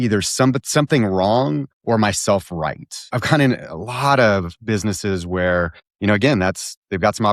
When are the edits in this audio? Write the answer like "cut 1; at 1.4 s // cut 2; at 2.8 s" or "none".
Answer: cut 1; at 3.1 s